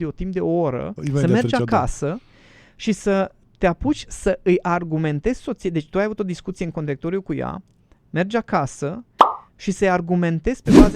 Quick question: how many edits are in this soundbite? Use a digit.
1